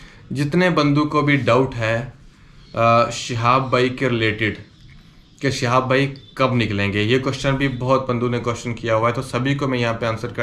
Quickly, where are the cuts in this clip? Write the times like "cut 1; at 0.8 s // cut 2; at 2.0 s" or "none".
none